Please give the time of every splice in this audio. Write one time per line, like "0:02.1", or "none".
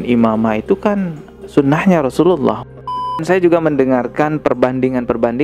0:02.6